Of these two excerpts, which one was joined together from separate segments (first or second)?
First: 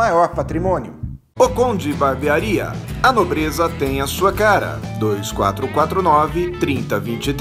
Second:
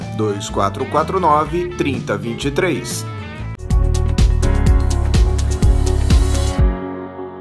second